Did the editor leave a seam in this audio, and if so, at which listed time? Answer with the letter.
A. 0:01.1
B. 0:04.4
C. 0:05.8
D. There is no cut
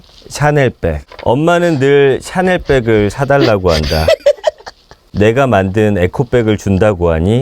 A